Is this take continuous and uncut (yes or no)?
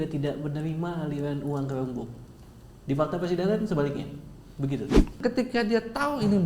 no